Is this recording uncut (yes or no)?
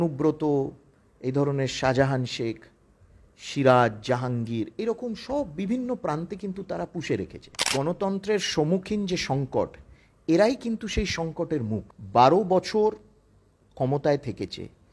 no